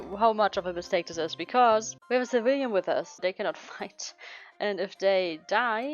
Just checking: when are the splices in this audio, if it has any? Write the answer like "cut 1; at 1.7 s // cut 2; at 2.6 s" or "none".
cut 1; at 2.0 s // cut 2; at 3.2 s